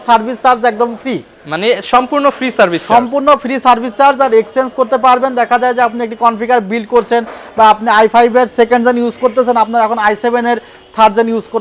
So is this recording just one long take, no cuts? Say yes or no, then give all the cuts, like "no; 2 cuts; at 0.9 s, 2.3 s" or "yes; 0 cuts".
yes; 0 cuts